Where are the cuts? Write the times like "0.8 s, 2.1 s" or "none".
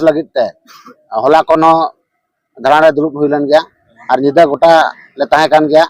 none